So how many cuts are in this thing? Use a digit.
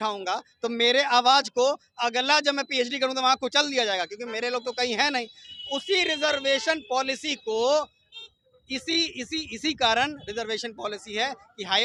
0